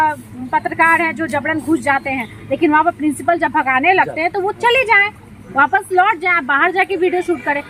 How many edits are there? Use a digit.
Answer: 0